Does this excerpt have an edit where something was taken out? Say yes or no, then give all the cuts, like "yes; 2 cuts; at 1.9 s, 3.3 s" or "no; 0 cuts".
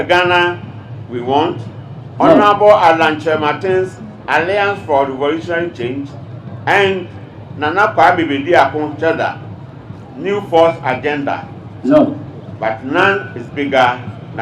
no; 0 cuts